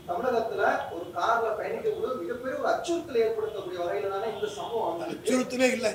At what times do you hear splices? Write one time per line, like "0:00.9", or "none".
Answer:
none